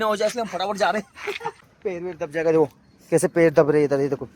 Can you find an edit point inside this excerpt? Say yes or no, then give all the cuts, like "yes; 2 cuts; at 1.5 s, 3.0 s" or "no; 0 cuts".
yes; 1 cut; at 1.6 s